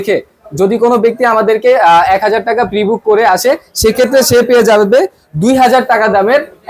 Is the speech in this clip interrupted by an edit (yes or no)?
no